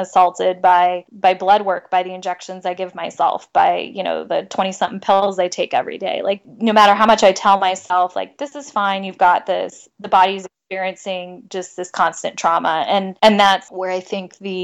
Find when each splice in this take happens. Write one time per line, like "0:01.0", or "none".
0:01.1
0:06.4
0:13.1
0:13.7